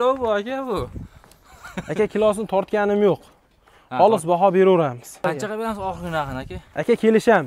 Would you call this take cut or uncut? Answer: cut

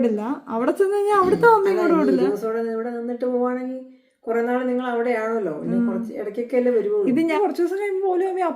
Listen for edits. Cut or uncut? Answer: cut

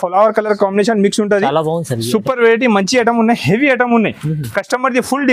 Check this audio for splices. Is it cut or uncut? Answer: uncut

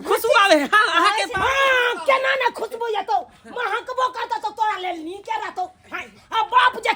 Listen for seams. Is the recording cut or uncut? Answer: uncut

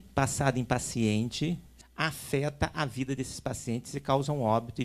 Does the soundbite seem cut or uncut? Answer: cut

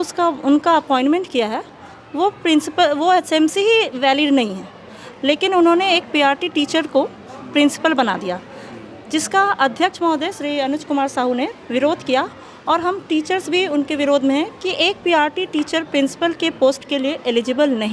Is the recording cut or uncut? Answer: uncut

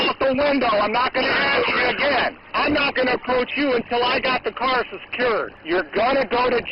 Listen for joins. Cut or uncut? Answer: cut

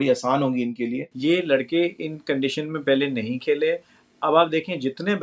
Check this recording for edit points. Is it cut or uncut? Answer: cut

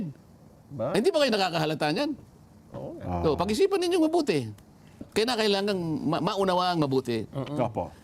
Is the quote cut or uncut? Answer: cut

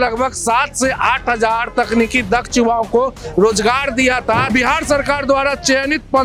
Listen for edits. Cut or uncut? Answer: cut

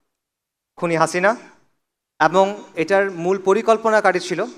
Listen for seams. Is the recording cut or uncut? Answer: uncut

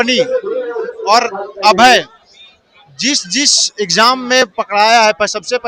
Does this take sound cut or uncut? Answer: uncut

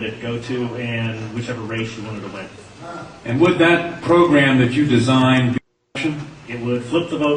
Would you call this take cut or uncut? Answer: cut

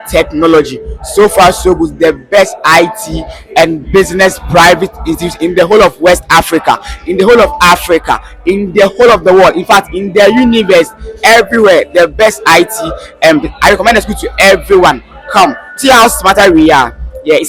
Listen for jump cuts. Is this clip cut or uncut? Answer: uncut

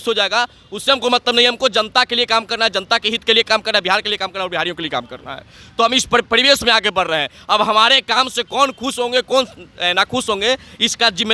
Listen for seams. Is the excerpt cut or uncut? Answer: uncut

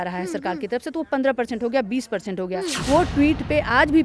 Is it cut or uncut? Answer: cut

